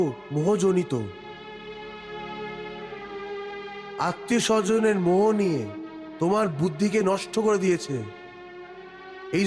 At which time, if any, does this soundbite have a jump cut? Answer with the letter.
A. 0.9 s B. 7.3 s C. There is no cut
C